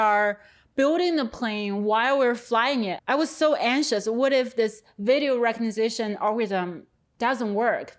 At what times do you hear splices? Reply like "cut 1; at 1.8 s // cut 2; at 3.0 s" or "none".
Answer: none